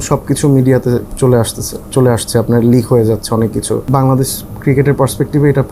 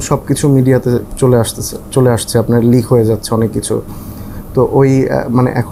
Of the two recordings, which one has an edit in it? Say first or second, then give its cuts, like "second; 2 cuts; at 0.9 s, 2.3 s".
first; 1 cut; at 3.8 s